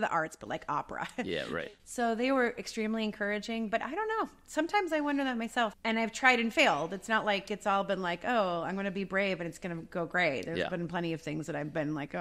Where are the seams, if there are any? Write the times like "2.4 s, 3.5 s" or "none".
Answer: 1.6 s, 5.8 s